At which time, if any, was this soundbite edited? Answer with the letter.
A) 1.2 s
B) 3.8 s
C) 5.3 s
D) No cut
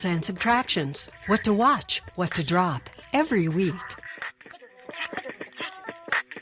D